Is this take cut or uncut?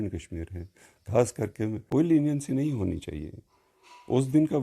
cut